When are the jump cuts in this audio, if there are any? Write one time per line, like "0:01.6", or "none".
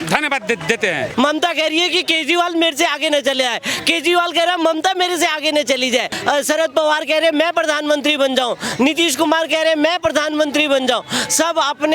0:01.1
0:06.1

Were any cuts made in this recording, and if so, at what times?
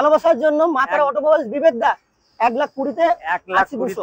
none

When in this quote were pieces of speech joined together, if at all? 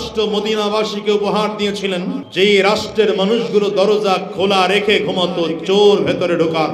0:02.2

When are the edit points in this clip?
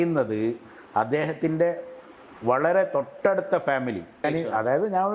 0:04.2

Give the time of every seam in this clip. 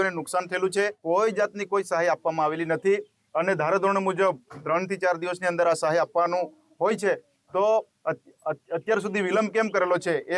0:01.0

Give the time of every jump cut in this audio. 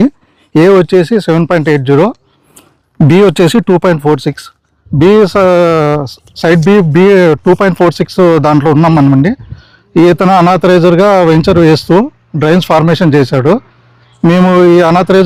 none

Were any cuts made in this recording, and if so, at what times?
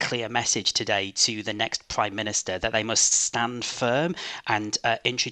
none

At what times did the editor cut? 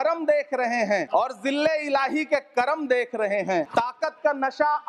0:01.1
0:03.7

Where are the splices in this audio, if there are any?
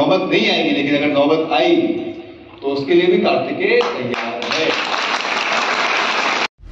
none

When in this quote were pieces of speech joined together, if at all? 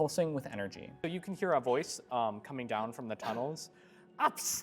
0:01.1

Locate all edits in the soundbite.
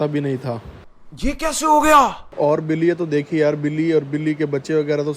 0:02.2

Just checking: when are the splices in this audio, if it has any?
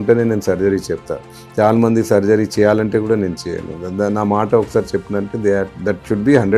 none

